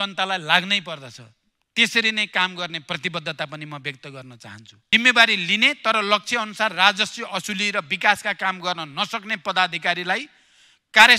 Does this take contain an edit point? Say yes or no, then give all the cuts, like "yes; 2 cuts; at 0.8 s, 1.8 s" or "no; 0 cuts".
yes; 1 cut; at 4.7 s